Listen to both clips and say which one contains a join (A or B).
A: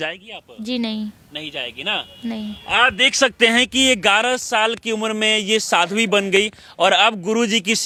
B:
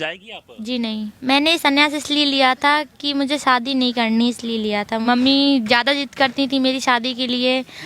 B